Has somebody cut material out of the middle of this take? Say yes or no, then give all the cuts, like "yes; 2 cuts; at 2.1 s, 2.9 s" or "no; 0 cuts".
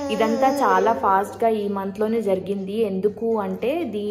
no; 0 cuts